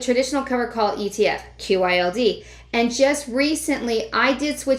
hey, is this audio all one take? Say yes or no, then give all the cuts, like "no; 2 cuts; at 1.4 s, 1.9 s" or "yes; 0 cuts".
yes; 0 cuts